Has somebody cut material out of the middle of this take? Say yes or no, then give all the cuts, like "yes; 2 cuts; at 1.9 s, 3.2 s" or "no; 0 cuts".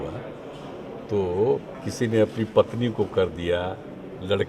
yes; 1 cut; at 1.8 s